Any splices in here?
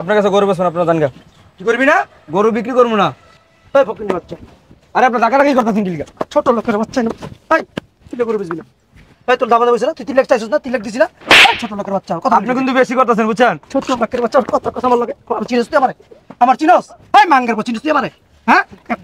yes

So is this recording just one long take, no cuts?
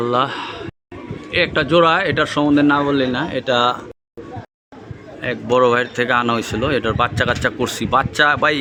yes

